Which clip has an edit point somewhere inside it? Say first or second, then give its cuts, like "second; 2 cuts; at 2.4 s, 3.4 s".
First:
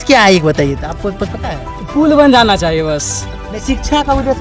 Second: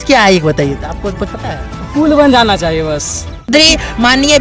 second; 1 cut; at 3.5 s